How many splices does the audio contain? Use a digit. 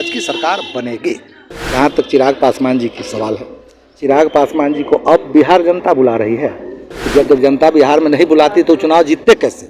1